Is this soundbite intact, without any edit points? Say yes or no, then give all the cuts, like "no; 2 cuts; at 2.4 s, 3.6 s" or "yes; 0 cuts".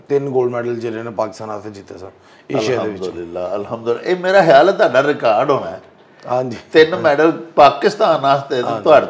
yes; 0 cuts